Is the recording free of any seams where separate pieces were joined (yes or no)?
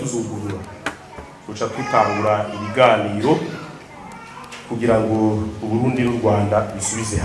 yes